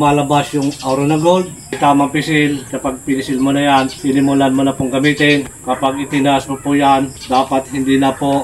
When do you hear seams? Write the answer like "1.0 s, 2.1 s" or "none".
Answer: 1.8 s, 2.7 s, 4.0 s, 5.5 s, 7.2 s